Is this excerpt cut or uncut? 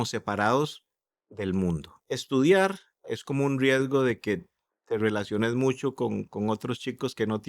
cut